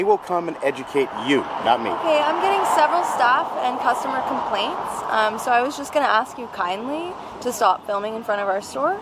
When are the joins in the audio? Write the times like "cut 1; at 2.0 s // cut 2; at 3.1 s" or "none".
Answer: none